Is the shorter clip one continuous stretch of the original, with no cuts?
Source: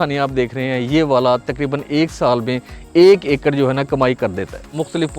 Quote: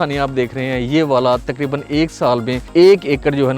no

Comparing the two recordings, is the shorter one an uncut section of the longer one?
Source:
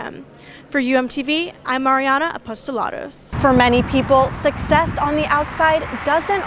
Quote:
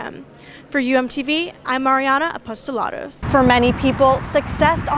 no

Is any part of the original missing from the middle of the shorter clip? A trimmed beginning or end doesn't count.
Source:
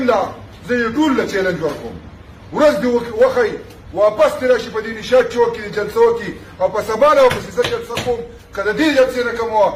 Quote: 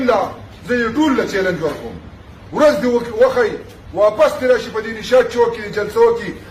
no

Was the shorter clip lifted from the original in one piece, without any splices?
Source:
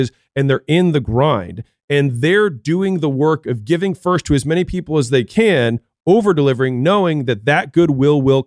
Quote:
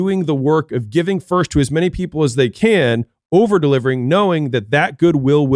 yes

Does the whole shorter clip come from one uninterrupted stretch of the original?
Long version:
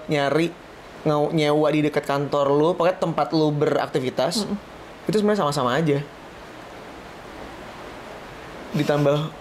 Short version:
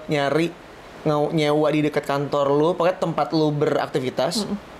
yes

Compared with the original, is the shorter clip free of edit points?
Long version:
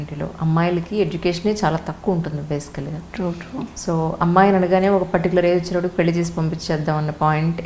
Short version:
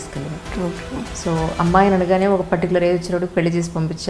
yes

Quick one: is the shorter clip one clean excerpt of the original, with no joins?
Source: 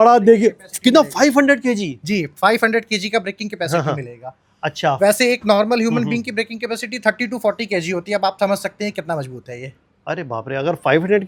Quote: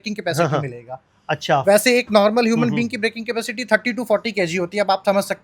yes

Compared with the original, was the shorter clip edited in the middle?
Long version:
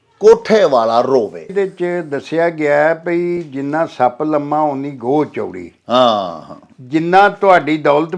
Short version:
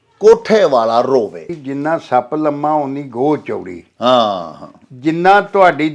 yes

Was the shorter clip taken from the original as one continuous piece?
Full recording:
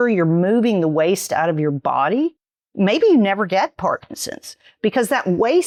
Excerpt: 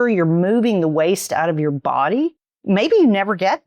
no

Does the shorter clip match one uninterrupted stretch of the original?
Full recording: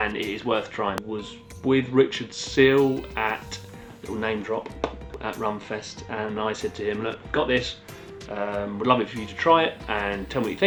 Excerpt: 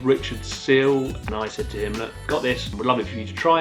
no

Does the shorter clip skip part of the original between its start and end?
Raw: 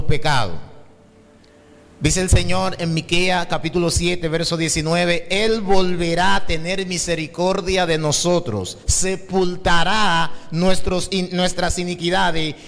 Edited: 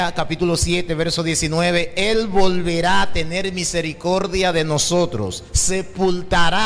no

